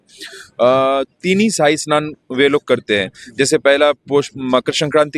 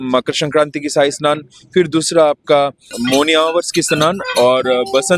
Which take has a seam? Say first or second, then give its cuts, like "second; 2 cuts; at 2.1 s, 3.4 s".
second; 1 cut; at 2.8 s